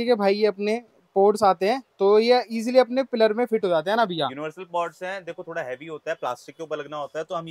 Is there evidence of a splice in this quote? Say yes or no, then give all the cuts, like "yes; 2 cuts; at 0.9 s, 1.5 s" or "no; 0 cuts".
no; 0 cuts